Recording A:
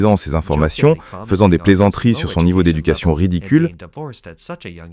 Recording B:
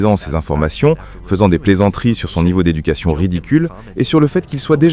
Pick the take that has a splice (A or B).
B